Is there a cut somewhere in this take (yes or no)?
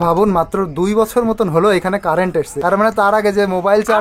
yes